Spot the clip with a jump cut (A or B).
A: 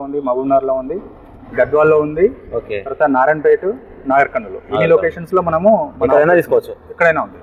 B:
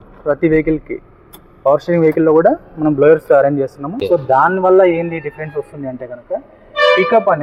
B